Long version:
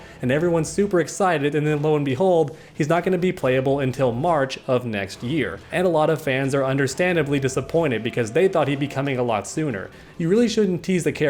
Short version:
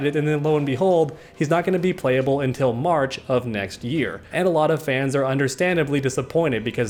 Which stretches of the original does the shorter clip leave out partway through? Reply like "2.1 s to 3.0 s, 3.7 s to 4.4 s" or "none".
none